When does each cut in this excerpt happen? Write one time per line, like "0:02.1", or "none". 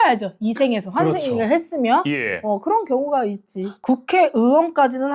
0:03.7